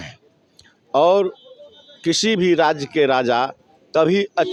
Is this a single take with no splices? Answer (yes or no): yes